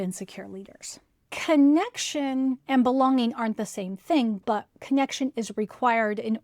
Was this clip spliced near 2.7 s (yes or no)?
no